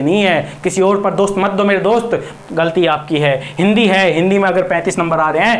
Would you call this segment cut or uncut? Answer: uncut